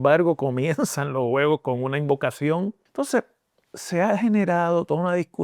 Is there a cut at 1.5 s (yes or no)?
no